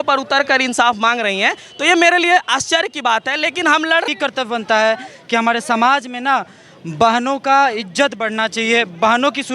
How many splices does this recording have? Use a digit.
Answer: 1